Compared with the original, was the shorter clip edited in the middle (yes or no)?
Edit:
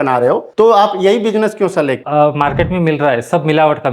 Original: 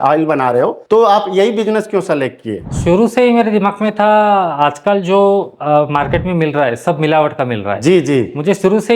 yes